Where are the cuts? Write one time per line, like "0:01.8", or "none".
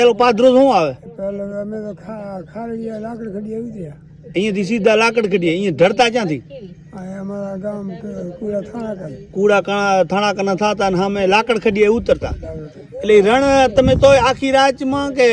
none